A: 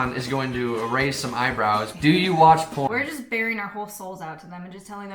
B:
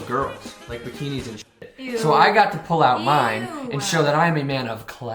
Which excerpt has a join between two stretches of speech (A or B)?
A